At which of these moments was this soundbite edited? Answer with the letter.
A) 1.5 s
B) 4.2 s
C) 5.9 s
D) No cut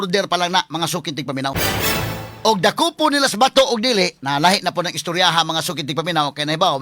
A